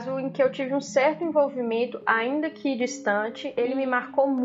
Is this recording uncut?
no; 1 cut; at 3.5 s

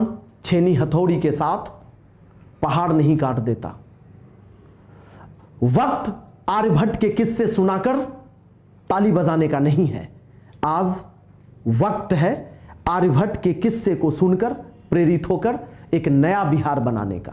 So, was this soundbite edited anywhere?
no; 0 cuts

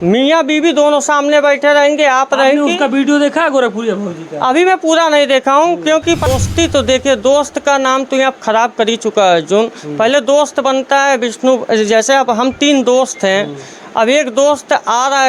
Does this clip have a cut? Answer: yes; 1 cut; at 6.3 s

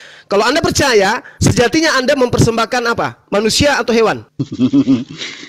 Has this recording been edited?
yes; 1 cut; at 4.3 s

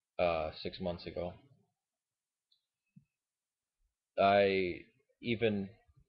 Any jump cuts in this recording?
yes; 1 cut; at 4.0 s

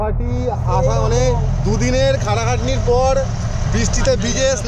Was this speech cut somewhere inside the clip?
no; 0 cuts

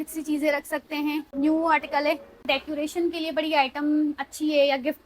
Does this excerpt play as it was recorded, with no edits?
no; 2 cuts; at 1.3 s, 2.4 s

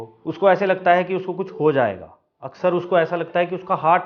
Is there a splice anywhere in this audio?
no; 0 cuts

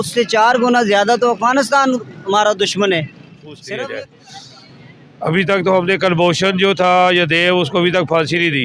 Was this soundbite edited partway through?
yes; 1 cut; at 3.5 s

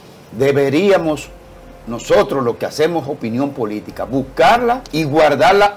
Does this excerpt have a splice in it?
yes; 1 cut; at 4.9 s

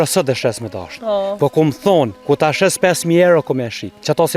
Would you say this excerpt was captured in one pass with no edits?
no; 1 cut; at 2.2 s

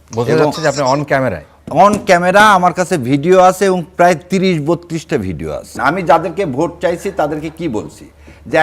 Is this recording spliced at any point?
yes; 1 cut; at 5.8 s

